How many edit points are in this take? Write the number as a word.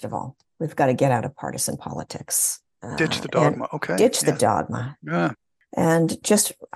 one